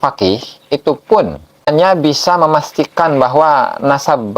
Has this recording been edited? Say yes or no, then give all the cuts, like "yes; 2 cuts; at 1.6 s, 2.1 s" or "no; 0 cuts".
yes; 1 cut; at 1.7 s